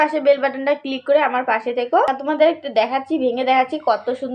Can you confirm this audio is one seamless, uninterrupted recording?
no; 1 cut; at 2.1 s

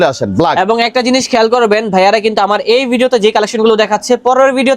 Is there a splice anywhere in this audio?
no; 0 cuts

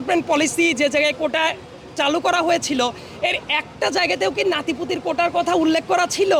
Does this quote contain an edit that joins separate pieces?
no; 0 cuts

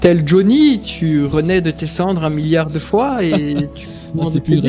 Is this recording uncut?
yes; 0 cuts

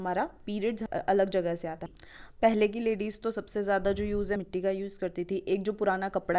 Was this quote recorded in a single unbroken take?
no; 3 cuts; at 0.8 s, 1.8 s, 4.4 s

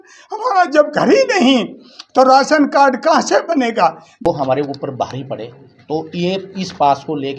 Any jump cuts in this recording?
yes; 1 cut; at 4.2 s

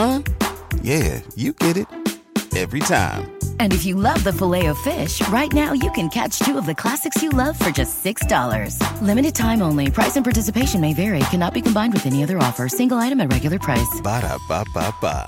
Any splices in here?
no; 0 cuts

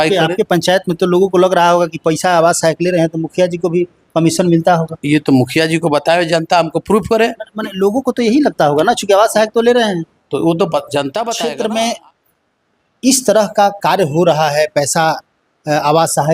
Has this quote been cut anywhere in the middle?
yes; 1 cut; at 11.3 s

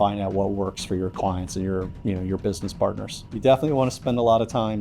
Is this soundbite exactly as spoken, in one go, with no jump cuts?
no; 1 cut; at 3.2 s

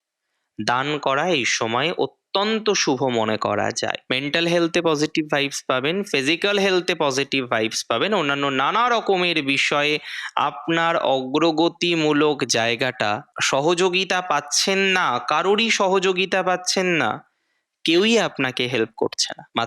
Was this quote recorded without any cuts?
no; 2 cuts; at 4.0 s, 13.3 s

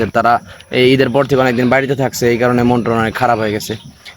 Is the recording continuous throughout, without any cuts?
yes; 0 cuts

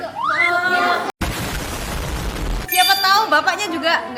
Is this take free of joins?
yes; 0 cuts

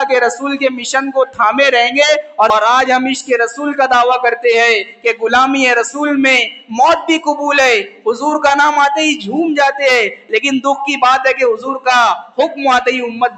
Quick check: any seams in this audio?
yes; 1 cut; at 2.5 s

